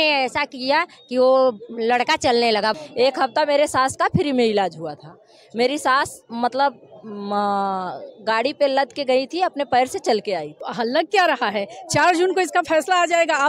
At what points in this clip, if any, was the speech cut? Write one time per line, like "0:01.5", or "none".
0:02.7
0:10.6